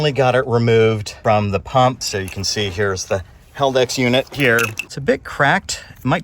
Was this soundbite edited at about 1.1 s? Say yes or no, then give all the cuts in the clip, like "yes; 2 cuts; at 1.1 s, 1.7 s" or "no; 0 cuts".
yes; 3 cuts; at 1.1 s, 2.0 s, 4.8 s